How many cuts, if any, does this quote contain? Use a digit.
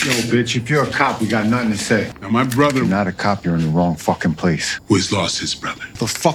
0